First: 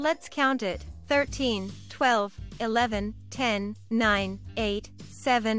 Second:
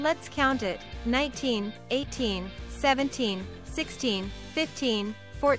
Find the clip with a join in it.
first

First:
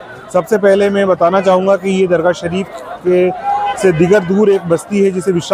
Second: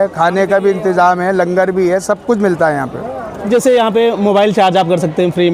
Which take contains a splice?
second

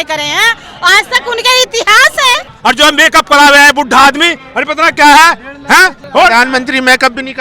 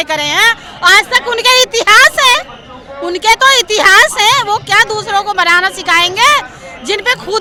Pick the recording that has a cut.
first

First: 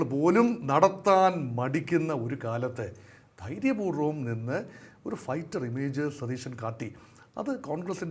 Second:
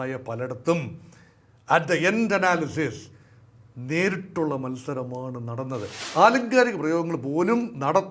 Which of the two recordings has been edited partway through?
second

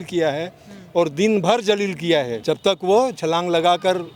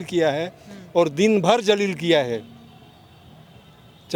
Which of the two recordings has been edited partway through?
first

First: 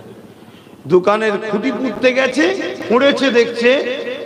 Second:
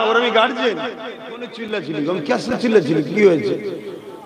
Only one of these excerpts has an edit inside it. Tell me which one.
second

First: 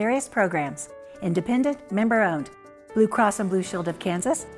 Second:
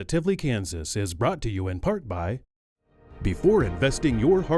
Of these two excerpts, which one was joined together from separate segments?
second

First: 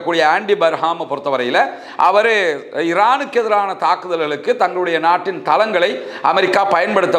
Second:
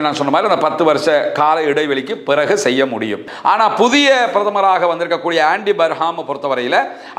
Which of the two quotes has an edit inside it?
second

